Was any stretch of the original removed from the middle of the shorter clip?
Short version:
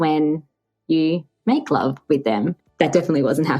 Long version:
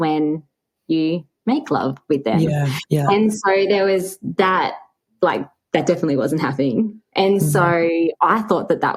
yes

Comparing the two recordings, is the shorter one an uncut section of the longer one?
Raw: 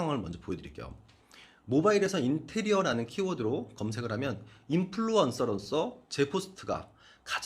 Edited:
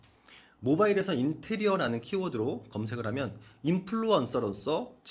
yes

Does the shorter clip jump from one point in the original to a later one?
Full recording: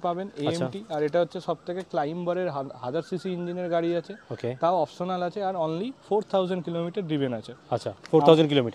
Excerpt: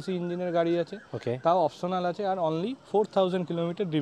no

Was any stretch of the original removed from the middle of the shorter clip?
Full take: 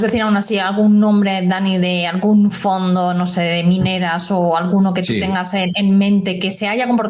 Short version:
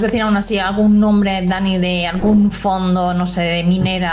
no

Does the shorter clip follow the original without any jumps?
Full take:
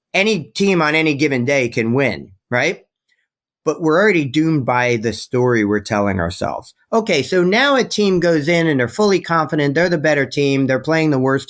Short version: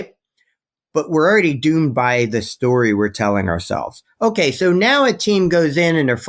yes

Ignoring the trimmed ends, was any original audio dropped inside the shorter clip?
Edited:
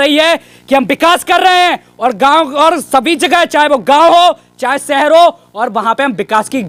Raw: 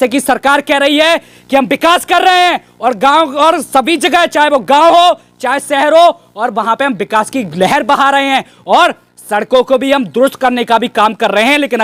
no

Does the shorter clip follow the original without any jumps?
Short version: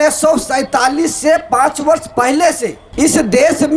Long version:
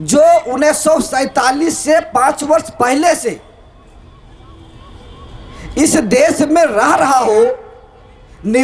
no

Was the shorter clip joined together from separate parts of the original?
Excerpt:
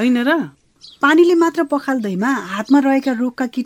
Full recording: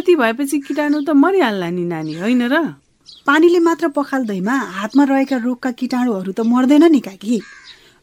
no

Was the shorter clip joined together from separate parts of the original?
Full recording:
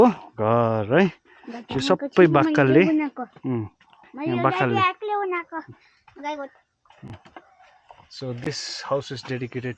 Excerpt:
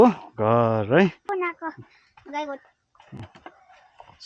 yes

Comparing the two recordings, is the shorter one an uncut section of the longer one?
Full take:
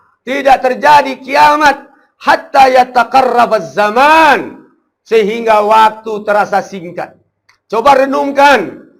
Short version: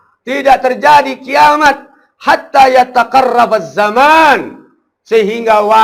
yes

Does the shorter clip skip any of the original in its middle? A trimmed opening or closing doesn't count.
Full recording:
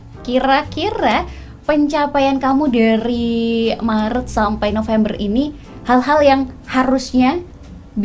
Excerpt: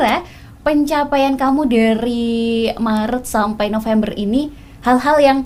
no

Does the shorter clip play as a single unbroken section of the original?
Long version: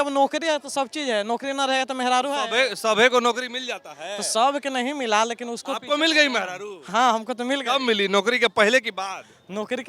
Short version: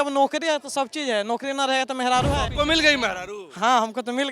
no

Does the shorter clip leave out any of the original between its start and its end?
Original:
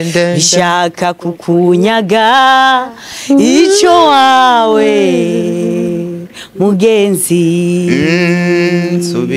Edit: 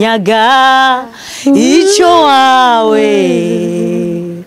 no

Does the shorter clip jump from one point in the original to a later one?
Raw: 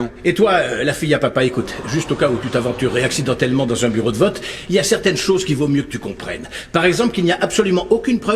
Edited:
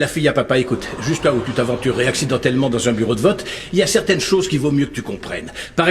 yes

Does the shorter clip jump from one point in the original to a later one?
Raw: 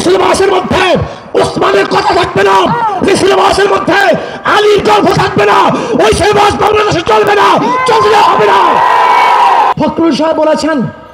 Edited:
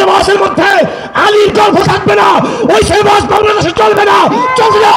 no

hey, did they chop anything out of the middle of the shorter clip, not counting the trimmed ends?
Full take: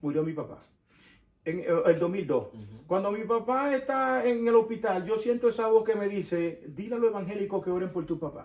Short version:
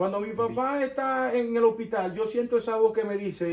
no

